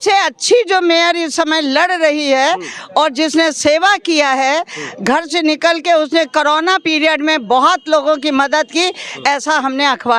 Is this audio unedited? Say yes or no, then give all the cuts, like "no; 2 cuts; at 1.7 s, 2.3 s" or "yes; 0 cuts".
yes; 0 cuts